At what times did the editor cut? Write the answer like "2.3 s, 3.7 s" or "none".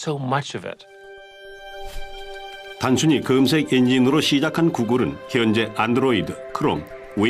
2.4 s